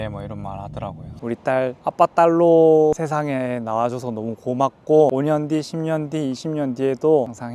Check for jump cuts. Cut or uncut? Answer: cut